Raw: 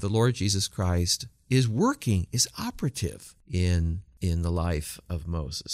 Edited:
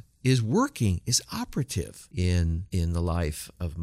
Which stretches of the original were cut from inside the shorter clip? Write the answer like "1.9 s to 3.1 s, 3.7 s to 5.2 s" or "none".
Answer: 3.3 s to 3.4 s, 4.0 s to 4.1 s